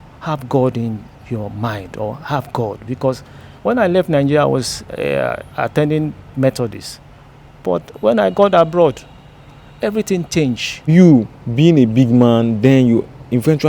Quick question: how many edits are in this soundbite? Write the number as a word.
one